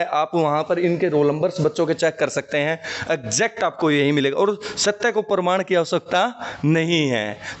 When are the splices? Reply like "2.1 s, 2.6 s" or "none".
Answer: none

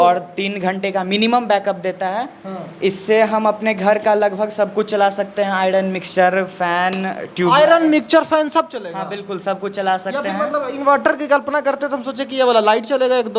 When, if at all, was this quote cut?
none

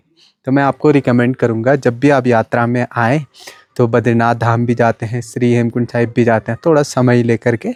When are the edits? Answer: none

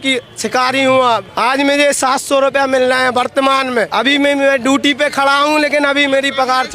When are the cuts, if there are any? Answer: 1.2 s, 3.9 s

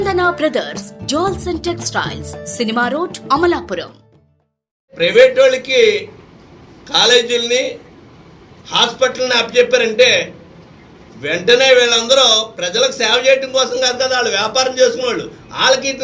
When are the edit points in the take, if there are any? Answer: 4.9 s

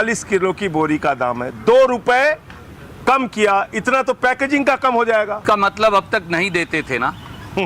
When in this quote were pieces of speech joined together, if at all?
5.4 s

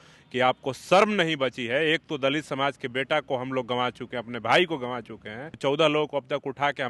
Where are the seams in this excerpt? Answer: 5.5 s

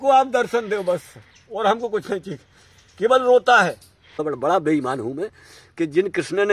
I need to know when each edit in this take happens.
4.2 s

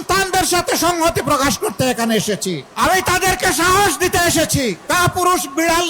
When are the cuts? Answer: 2.7 s, 4.8 s

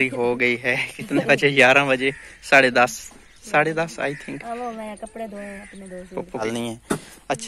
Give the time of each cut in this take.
6.4 s

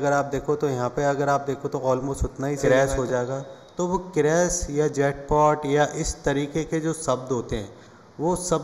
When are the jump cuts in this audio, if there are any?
2.6 s

